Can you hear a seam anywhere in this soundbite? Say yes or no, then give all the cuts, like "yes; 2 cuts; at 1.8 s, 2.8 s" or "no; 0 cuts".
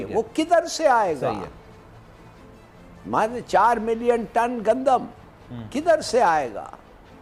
no; 0 cuts